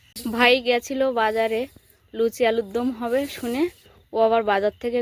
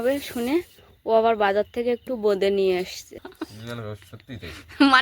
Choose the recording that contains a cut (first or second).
second